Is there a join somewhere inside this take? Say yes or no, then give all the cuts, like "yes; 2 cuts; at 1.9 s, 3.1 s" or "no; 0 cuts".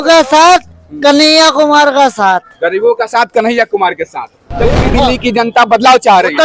yes; 1 cut; at 4.5 s